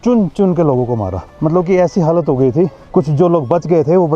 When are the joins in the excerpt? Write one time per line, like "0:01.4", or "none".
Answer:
none